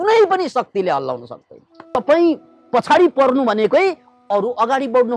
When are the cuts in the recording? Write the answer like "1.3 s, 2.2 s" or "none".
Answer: 1.7 s